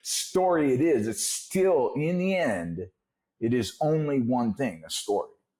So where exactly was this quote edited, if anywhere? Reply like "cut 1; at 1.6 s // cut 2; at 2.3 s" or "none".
none